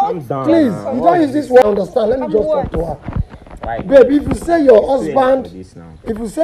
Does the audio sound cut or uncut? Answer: cut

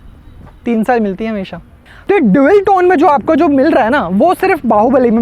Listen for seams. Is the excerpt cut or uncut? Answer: cut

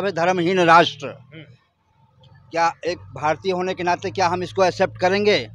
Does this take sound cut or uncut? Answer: uncut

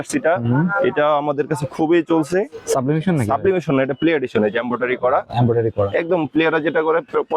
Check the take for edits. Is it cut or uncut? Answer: uncut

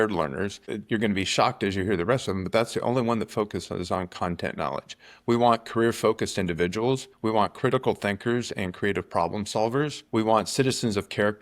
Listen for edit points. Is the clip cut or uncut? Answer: cut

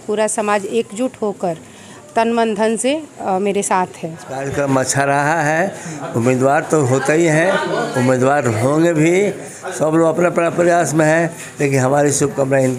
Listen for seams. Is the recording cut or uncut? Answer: cut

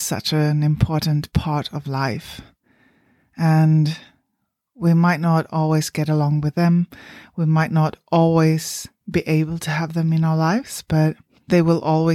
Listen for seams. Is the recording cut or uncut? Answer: uncut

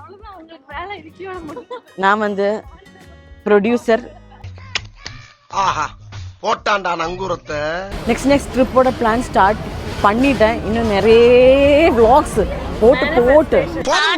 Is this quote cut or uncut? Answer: cut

